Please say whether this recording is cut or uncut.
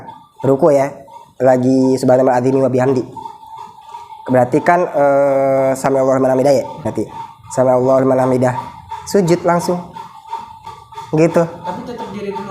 cut